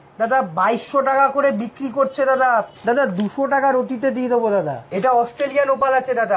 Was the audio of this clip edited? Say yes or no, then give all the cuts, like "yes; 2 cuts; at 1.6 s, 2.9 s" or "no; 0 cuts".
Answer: yes; 2 cuts; at 2.7 s, 4.8 s